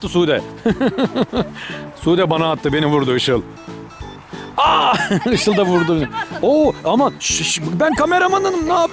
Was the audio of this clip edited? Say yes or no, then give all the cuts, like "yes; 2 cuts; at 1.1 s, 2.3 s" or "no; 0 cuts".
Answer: no; 0 cuts